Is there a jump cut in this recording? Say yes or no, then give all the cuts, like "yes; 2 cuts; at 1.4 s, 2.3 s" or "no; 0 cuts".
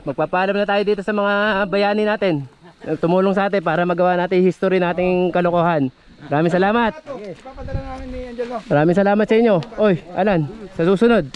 no; 0 cuts